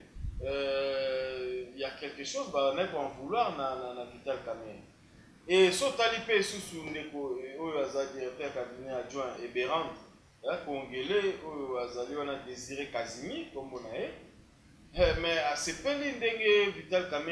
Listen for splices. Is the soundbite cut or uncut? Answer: uncut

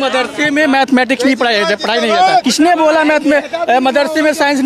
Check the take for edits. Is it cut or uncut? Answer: cut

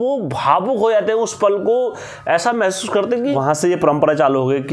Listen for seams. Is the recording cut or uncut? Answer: cut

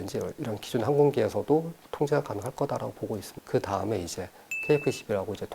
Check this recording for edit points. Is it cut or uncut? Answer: cut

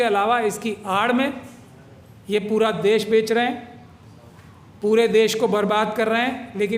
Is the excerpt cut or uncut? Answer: uncut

